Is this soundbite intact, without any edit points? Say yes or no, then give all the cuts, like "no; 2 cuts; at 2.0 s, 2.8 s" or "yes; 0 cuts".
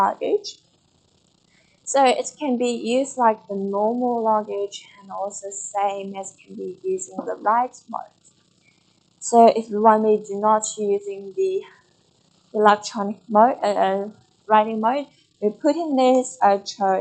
yes; 0 cuts